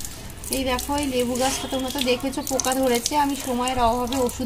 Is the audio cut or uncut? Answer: uncut